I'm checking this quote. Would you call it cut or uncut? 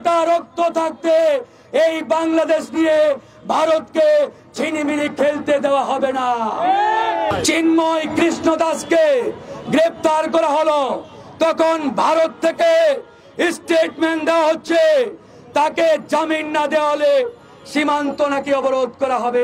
cut